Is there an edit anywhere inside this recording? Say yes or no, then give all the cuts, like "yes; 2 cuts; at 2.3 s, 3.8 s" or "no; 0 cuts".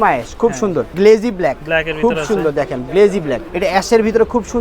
yes; 2 cuts; at 0.9 s, 3.5 s